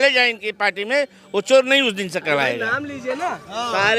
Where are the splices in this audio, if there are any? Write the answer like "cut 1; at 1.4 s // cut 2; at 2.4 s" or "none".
none